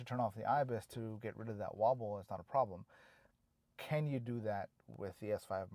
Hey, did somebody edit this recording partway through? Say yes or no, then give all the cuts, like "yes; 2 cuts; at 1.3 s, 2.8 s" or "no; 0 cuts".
no; 0 cuts